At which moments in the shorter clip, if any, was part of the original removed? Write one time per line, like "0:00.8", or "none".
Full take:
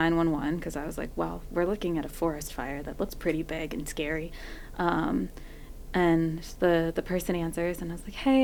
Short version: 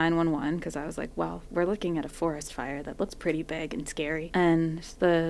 0:04.2